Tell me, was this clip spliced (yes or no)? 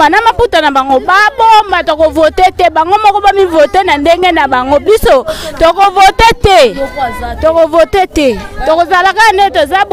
no